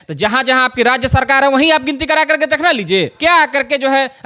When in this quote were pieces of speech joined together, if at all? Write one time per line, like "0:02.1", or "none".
0:03.1